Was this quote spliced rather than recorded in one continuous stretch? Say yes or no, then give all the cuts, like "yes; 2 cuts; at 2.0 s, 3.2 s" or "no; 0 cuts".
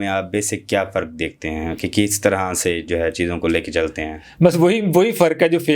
no; 0 cuts